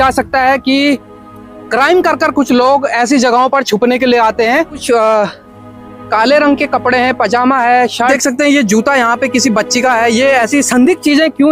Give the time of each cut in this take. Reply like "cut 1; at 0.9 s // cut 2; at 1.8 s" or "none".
cut 1; at 4.8 s // cut 2; at 8.1 s